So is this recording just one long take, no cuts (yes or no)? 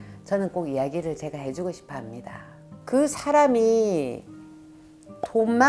no